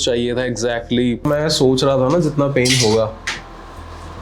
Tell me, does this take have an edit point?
yes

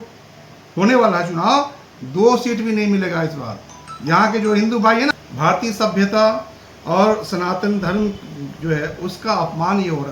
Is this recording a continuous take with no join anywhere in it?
no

